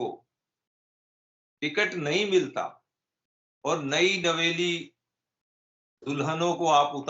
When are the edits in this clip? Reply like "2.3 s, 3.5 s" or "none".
none